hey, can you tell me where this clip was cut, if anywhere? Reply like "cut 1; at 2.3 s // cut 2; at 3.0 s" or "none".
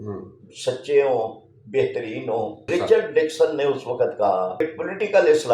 cut 1; at 2.6 s // cut 2; at 4.6 s

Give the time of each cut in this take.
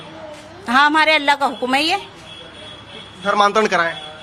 none

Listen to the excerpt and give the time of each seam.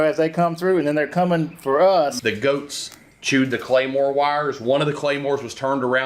cut 1; at 2.2 s

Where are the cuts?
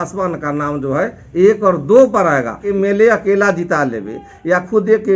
cut 1; at 2.6 s

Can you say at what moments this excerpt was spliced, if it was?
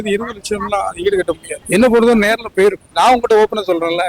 cut 1; at 1.5 s // cut 2; at 2.8 s

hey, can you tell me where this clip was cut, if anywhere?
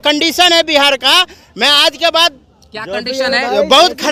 none

